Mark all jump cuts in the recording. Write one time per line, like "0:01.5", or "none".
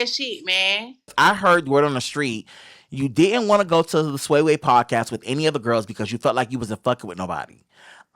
0:01.1

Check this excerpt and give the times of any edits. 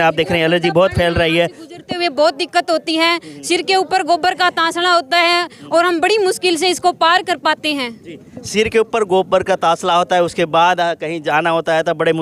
none

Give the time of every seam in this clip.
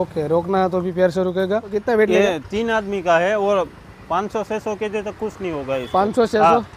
0:01.7

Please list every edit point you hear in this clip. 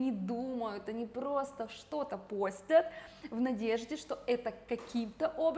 none

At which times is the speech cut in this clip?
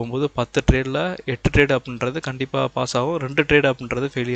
none

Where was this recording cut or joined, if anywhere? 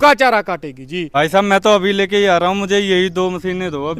0:01.0

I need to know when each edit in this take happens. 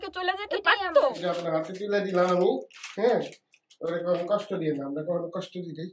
0:01.2

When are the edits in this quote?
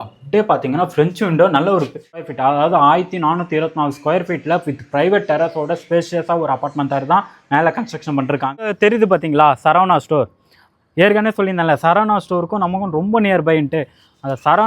0:02.2
0:08.6

